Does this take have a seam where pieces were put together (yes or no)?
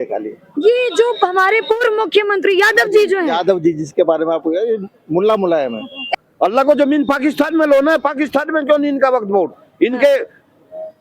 yes